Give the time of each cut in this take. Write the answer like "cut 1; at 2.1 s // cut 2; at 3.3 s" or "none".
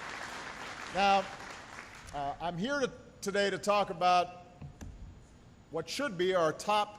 none

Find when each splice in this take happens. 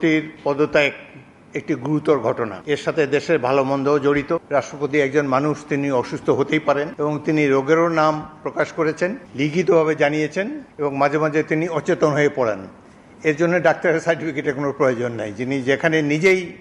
cut 1; at 2.6 s // cut 2; at 4.4 s // cut 3; at 6.9 s // cut 4; at 9.2 s // cut 5; at 10.6 s

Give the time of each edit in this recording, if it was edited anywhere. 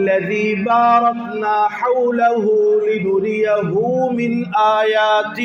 none

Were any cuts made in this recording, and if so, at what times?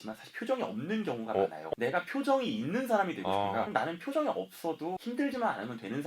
cut 1; at 1.7 s // cut 2; at 3.7 s // cut 3; at 5.0 s

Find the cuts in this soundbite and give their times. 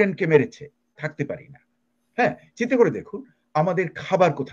cut 1; at 0.9 s

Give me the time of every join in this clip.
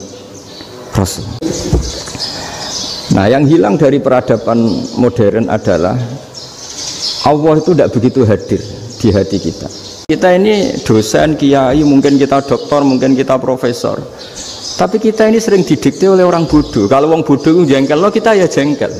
cut 1; at 1.4 s // cut 2; at 10.0 s

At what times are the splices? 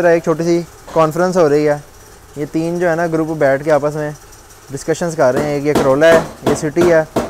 none

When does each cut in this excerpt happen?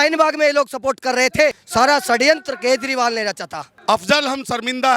cut 1; at 3.7 s

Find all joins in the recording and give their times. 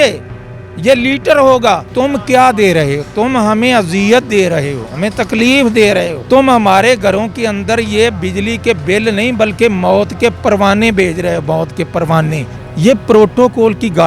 cut 1; at 1.9 s // cut 2; at 6.2 s // cut 3; at 12.5 s

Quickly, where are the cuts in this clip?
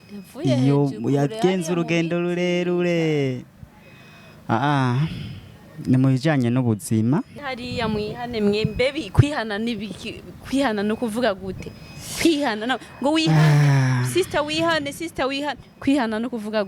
cut 1; at 7.4 s

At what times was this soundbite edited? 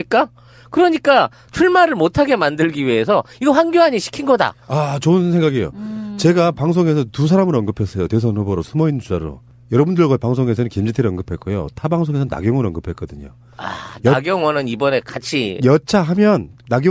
cut 1; at 9.6 s

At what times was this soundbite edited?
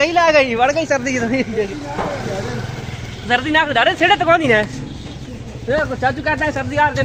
none

